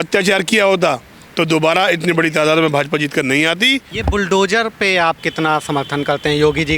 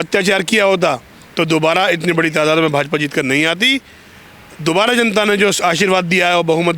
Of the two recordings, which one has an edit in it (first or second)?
first